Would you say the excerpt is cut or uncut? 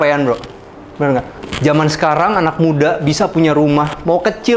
cut